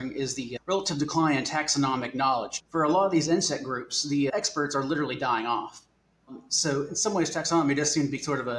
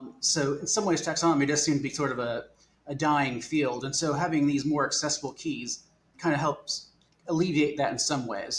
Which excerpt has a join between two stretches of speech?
first; 2 cuts; at 2.6 s, 4.3 s

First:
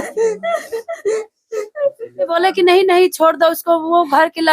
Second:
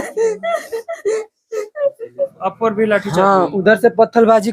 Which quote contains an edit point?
first; 1 cut; at 2.3 s

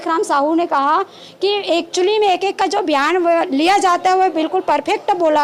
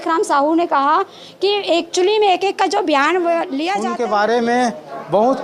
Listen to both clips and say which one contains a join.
second; 1 cut; at 3.7 s

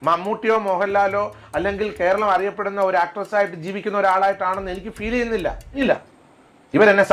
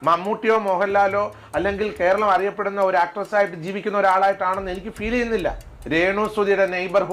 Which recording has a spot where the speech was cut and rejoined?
first; 1 cut; at 5.8 s

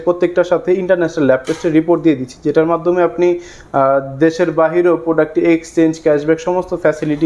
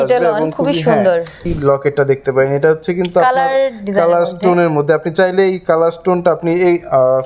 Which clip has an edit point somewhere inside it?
second; 1 cut; at 1.4 s

